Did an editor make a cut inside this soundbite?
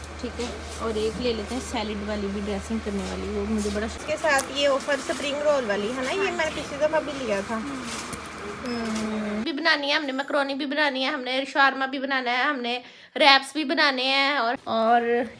yes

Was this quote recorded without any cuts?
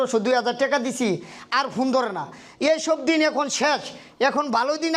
yes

